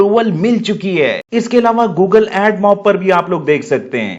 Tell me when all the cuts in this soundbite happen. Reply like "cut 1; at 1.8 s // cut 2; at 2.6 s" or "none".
cut 1; at 1.4 s